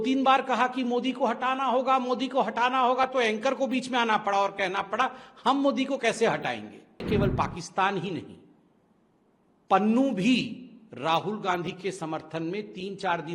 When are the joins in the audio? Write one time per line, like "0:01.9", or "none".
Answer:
0:07.0